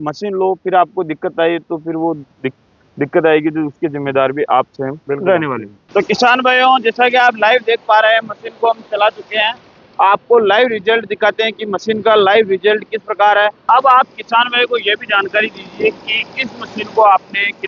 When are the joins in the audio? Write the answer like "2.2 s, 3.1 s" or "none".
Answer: 5.7 s, 13.6 s